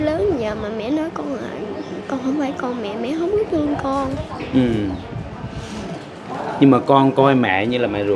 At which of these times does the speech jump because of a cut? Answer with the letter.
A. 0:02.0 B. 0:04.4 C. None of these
C